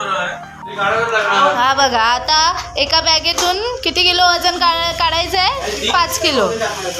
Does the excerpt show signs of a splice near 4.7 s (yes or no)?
no